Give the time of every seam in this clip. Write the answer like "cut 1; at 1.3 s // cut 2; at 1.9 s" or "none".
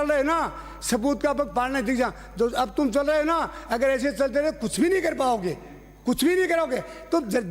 none